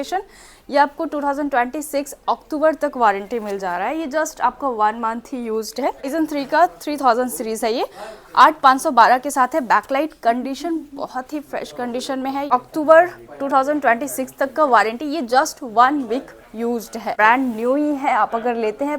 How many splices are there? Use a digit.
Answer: 3